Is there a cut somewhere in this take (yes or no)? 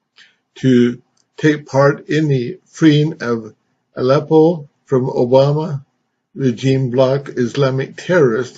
no